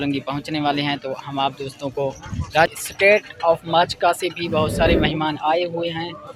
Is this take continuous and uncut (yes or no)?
yes